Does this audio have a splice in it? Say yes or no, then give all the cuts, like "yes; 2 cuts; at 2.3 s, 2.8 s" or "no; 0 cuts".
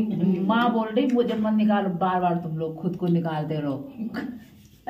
no; 0 cuts